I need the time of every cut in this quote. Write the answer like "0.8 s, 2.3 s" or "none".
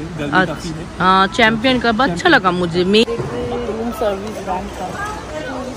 3.0 s